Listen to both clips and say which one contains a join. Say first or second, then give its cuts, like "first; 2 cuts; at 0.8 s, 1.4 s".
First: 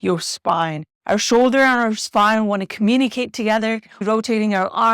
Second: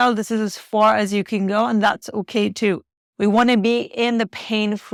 first; 1 cut; at 4.0 s